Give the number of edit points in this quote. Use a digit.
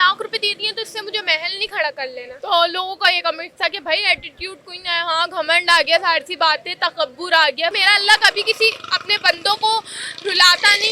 2